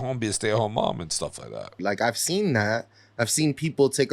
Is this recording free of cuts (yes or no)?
no